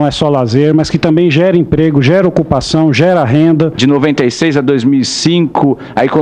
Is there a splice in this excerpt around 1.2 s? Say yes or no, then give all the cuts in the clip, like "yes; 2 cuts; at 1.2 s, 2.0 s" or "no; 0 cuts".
no; 1 cut; at 3.8 s